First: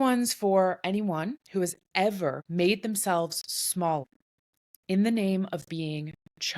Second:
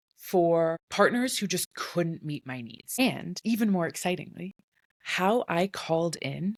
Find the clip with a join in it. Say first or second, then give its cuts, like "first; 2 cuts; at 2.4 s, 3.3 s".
first; 3 cuts; at 1.4 s, 2.4 s, 4.1 s